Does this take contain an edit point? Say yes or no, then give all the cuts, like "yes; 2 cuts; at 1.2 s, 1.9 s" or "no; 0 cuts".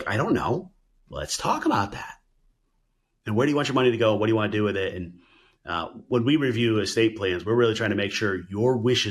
no; 0 cuts